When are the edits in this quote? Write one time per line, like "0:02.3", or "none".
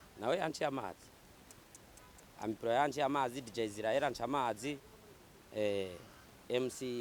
none